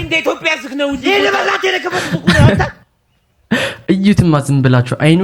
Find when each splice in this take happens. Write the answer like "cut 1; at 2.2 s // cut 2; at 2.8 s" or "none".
none